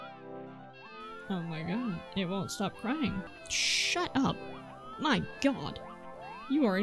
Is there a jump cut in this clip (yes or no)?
yes